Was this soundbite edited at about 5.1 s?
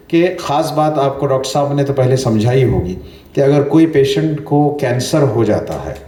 no; 0 cuts

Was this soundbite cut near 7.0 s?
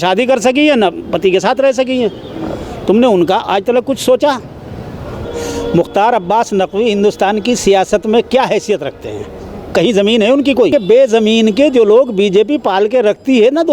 no; 2 cuts; at 5.1 s, 10.7 s

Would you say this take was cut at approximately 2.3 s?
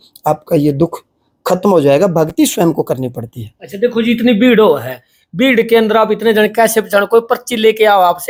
no; 0 cuts

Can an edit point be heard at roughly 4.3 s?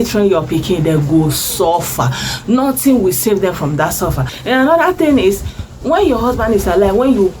yes; 1 cut; at 4.3 s

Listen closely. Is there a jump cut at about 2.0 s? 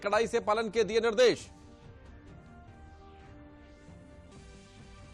no; 1 cut; at 4.2 s

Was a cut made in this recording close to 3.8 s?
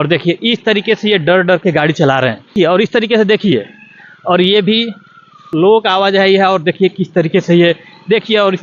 no; 2 cuts; at 2.4 s, 5.4 s

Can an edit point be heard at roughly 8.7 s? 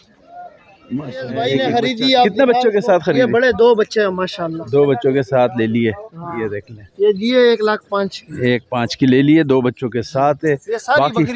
no; 1 cut; at 1.5 s

